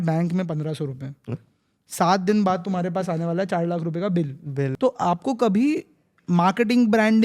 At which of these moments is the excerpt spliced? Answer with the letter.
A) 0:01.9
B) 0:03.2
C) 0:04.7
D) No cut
C